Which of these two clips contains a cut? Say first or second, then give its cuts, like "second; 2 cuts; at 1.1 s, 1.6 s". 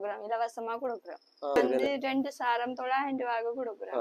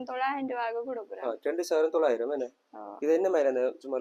first; 1 cut; at 1.6 s